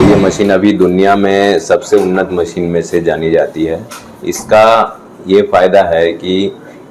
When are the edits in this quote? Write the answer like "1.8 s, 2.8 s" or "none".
none